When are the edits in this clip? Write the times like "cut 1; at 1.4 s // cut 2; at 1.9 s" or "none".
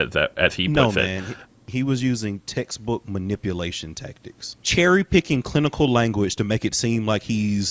cut 1; at 1.7 s // cut 2; at 4.5 s